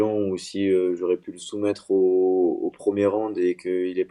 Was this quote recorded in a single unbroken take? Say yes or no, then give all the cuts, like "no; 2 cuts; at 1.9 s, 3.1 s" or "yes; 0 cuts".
yes; 0 cuts